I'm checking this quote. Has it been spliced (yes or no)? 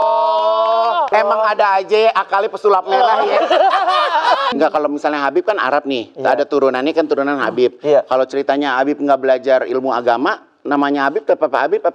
yes